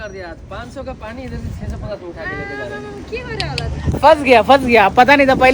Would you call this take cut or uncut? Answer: uncut